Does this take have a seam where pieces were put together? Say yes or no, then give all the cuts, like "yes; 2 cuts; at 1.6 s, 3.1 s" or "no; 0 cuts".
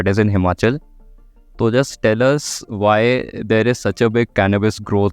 no; 0 cuts